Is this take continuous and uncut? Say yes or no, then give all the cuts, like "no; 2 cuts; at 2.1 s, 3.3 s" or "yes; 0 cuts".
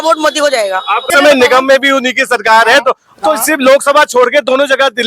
no; 1 cut; at 1.1 s